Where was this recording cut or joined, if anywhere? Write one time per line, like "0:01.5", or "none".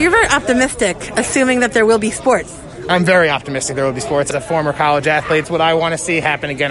0:04.3
0:05.5